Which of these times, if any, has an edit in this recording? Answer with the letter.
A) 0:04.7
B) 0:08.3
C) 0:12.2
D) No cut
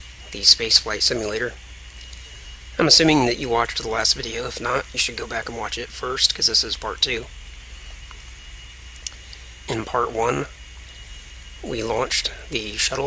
D